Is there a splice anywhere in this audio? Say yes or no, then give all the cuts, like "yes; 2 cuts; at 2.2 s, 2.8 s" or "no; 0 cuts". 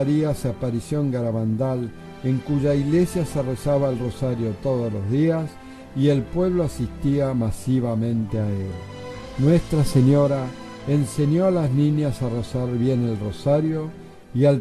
no; 0 cuts